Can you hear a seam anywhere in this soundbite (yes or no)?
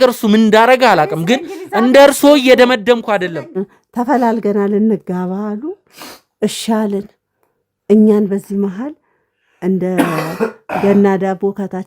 yes